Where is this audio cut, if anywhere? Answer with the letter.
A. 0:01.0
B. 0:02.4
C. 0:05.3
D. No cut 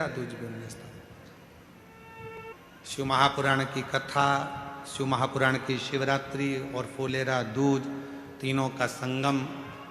B